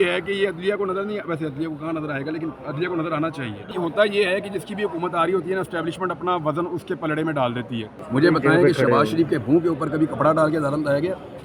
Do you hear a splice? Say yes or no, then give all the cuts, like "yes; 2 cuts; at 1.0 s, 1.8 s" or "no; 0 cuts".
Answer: yes; 2 cuts; at 3.7 s, 7.9 s